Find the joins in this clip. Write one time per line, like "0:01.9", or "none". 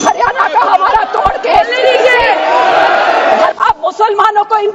0:03.5